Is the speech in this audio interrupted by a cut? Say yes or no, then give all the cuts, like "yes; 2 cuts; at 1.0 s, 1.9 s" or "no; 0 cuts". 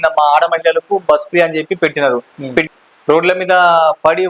yes; 1 cut; at 2.7 s